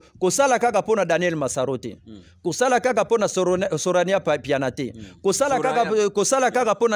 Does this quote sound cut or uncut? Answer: uncut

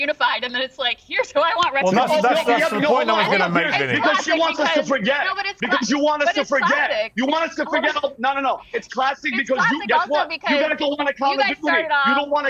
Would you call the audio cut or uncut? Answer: uncut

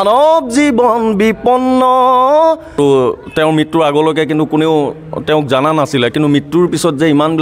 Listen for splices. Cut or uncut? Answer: cut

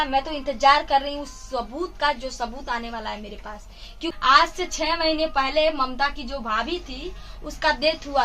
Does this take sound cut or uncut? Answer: cut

